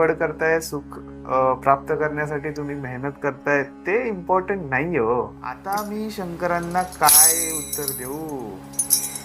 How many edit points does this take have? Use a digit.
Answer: 1